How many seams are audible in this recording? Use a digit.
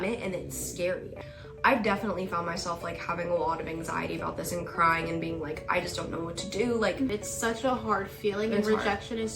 2